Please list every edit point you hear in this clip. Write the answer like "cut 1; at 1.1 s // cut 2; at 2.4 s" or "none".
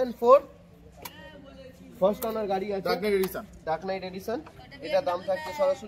none